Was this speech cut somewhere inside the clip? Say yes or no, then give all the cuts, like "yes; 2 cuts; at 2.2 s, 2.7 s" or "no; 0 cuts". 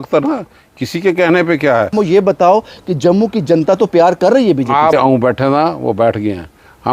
yes; 2 cuts; at 1.9 s, 4.9 s